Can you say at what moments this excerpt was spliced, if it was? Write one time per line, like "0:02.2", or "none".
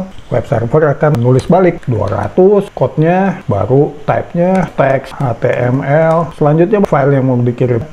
none